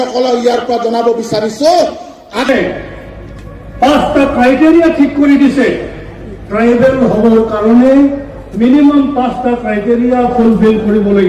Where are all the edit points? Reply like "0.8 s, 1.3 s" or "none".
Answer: 2.5 s

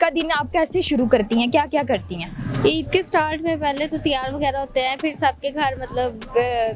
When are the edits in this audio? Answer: none

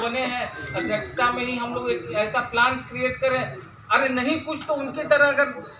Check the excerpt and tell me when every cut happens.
none

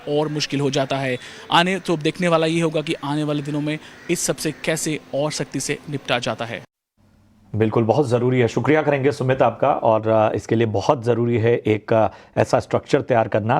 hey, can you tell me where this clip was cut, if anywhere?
8.1 s

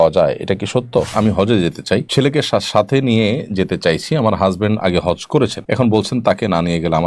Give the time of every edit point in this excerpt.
1.1 s, 2.1 s, 5.6 s

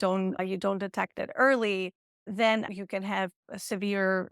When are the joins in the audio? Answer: 2.7 s

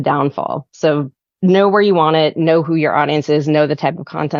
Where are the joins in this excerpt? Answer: none

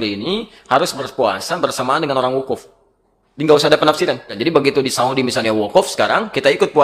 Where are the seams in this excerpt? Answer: 4.3 s

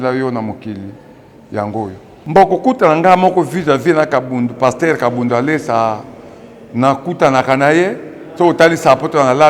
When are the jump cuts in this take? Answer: 2.1 s

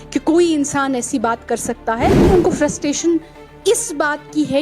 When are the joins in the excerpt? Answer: 2.2 s

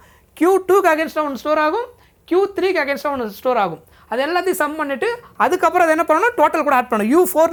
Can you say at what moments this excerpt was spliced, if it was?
none

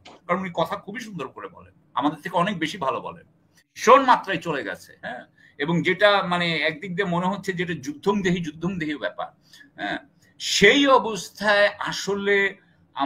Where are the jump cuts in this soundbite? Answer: 3.8 s

